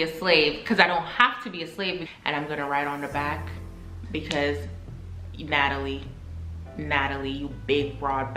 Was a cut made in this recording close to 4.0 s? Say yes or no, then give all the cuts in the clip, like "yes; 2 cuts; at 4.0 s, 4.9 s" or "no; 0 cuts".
no; 1 cut; at 2.0 s